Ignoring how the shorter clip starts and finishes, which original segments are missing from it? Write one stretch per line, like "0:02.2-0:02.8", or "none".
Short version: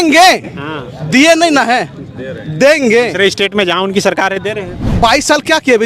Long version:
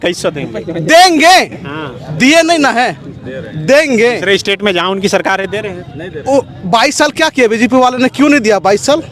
0:05.9-0:06.6